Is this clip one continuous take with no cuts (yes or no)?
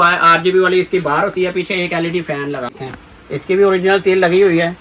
no